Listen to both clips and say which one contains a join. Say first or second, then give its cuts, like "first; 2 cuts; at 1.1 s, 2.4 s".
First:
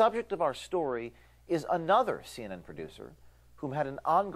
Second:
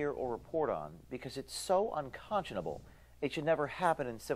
second; 1 cut; at 1.8 s